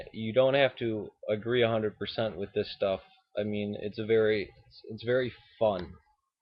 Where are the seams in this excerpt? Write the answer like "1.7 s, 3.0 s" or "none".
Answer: 4.0 s

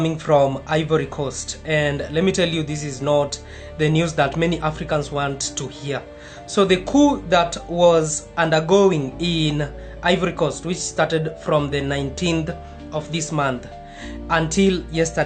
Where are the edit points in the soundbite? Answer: none

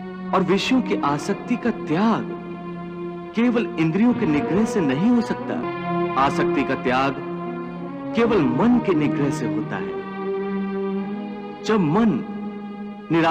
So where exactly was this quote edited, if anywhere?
5.7 s

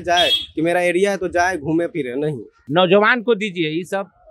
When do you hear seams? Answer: 2.6 s

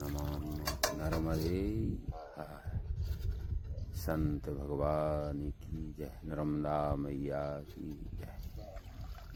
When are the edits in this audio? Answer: none

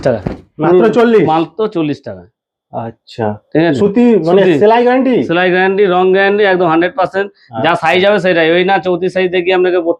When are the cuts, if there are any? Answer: none

